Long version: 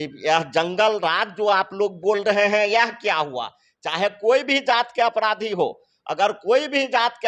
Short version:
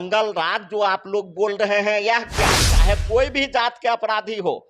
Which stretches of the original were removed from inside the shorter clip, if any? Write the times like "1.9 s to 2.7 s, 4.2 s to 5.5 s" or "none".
3.3 s to 3.8 s

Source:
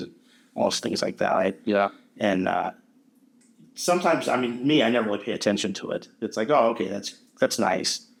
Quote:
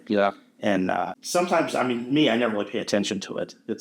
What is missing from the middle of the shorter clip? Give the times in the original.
2.8 s to 3.7 s

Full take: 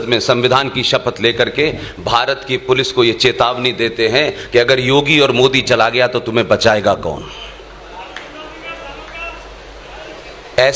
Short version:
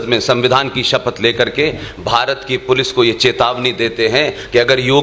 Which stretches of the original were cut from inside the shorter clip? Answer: none

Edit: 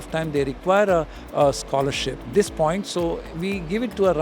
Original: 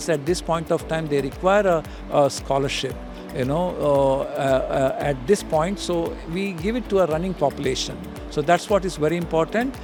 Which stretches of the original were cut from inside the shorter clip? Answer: 3.0 s to 5.2 s

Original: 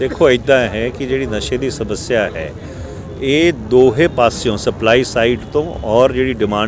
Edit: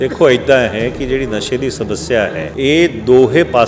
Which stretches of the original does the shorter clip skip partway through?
2.5 s to 3.1 s

